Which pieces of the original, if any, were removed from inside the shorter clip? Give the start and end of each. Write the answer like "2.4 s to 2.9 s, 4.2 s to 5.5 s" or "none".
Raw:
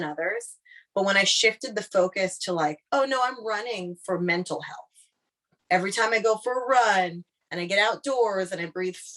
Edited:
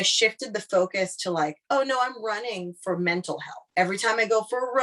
4.8 s to 5.5 s